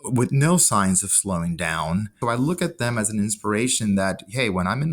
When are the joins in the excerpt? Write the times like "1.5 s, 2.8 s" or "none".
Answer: 2.2 s